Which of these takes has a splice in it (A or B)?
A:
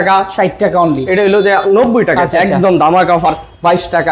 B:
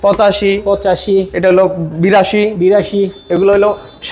A